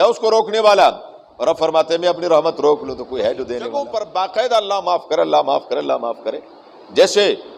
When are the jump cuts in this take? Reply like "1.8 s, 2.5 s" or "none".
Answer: 3.6 s

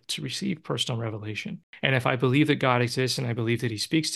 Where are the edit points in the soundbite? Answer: 1.7 s

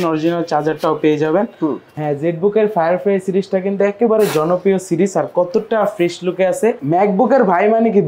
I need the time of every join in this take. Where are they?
1.9 s, 6.8 s

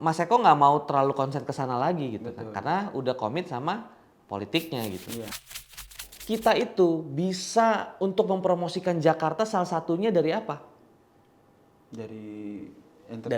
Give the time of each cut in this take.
5.8 s

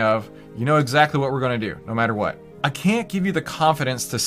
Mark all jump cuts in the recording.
2.5 s

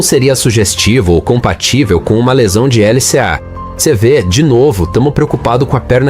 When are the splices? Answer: 3.7 s

